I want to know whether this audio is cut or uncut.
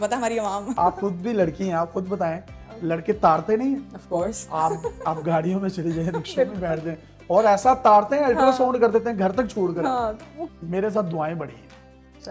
cut